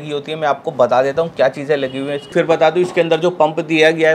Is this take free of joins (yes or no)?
no